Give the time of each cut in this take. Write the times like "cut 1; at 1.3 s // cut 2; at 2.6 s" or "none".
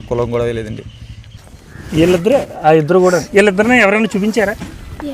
cut 1; at 1.4 s